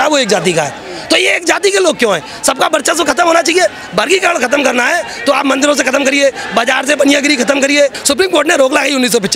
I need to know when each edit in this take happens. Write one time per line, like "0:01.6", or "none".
0:08.0